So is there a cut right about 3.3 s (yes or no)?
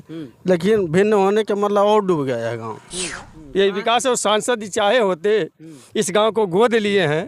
yes